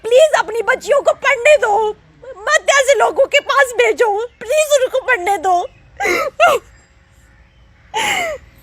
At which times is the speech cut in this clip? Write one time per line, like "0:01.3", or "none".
none